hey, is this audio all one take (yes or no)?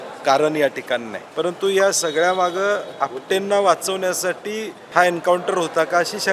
no